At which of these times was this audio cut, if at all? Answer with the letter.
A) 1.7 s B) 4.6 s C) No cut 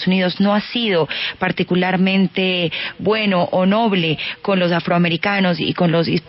C